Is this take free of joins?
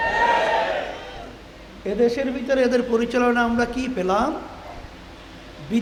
yes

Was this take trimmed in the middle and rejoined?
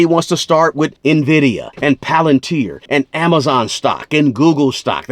yes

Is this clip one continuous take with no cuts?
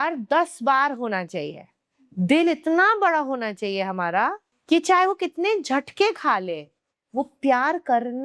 no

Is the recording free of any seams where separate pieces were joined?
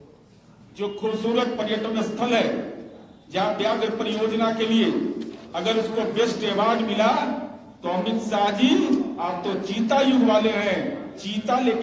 yes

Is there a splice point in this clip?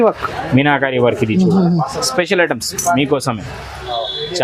no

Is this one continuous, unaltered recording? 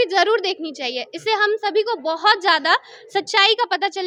yes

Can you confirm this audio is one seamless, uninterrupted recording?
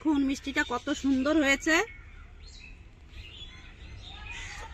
yes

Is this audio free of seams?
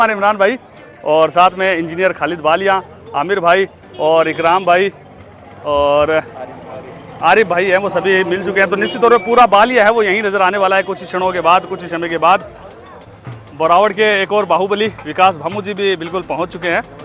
yes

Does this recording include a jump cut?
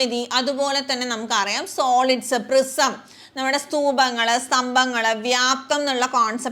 no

